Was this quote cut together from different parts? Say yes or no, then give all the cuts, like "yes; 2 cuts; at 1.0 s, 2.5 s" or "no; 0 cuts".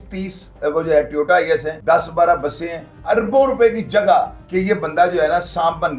yes; 3 cuts; at 1.7 s, 3.0 s, 4.4 s